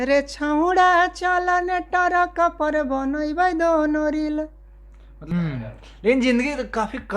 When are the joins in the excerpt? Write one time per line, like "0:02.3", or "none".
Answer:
0:05.2